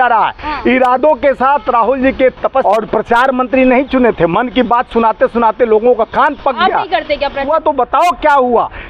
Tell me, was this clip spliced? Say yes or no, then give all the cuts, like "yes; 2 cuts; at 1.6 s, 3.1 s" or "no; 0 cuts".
yes; 2 cuts; at 2.6 s, 7.5 s